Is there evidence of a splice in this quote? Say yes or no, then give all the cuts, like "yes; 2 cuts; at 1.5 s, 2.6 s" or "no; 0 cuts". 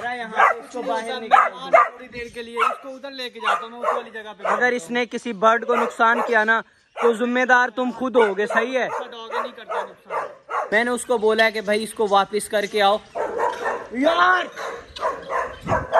yes; 1 cut; at 10.6 s